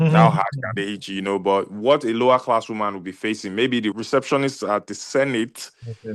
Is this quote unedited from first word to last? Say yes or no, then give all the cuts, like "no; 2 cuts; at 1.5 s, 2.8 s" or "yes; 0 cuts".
no; 1 cut; at 3.9 s